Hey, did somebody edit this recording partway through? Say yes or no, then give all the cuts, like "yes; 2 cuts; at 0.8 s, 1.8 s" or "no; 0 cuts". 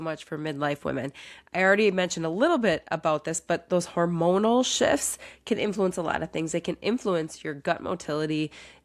no; 0 cuts